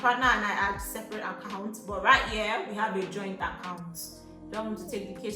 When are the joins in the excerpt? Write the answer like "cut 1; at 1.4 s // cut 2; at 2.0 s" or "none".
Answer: cut 1; at 4.3 s